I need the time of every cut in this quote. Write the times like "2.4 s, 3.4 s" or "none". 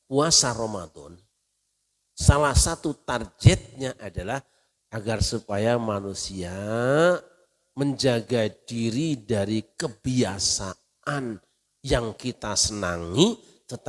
none